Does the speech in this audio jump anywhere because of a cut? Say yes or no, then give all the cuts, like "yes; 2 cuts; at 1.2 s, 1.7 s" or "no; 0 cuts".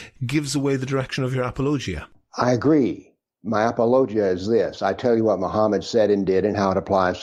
no; 0 cuts